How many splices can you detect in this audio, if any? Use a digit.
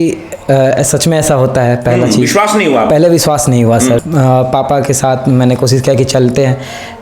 1